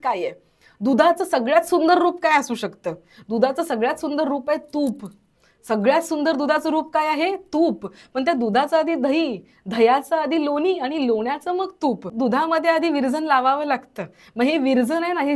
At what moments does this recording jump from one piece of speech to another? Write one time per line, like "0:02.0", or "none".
0:12.1